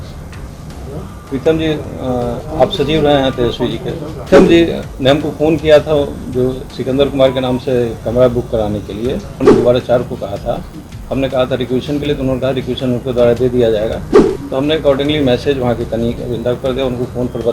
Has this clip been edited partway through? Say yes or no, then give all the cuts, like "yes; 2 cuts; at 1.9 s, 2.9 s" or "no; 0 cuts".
yes; 2 cuts; at 4.3 s, 9.5 s